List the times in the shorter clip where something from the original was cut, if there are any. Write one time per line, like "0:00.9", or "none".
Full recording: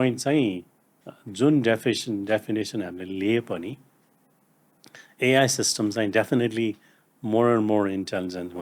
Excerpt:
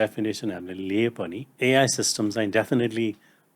0:01.4